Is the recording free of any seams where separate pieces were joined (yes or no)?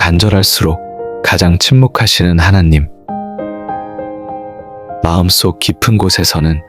no